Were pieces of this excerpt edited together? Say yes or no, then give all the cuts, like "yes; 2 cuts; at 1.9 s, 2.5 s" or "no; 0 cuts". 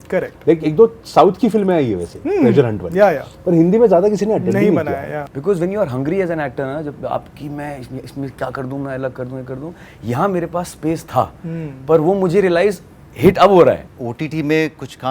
yes; 2 cuts; at 5.1 s, 13.8 s